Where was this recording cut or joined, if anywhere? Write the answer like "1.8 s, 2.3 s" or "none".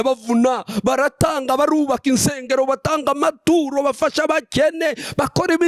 none

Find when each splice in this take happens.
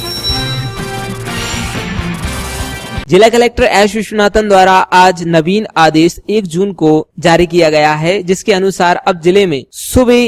2.9 s

